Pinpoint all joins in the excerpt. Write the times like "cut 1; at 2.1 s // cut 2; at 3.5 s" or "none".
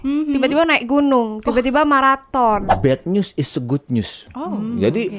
cut 1; at 2.7 s